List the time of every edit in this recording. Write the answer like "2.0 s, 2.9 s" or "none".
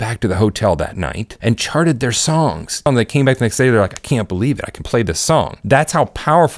1.2 s, 2.8 s, 5.6 s